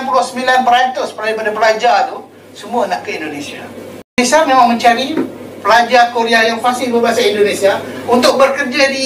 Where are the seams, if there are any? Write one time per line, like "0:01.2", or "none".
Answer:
0:04.2